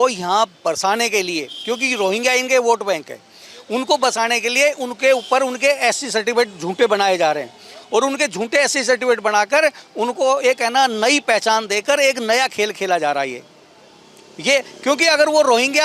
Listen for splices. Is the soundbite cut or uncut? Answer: uncut